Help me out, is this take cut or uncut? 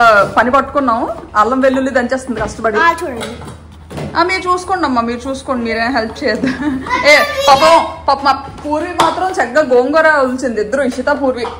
uncut